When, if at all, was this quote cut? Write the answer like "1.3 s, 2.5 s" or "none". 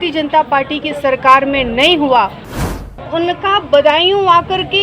2.9 s